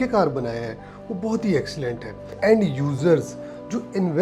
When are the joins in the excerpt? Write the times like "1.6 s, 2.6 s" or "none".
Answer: 2.4 s